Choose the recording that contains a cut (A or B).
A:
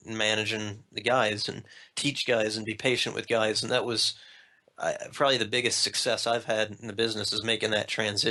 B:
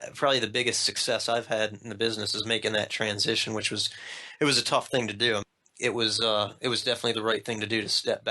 B